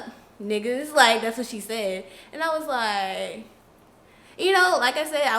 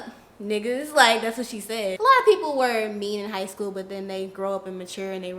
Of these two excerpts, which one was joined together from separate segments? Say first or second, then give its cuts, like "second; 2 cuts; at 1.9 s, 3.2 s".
second; 1 cut; at 1.9 s